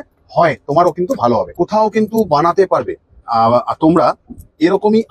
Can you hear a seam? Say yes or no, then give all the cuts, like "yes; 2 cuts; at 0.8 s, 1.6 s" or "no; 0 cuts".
yes; 1 cut; at 1.5 s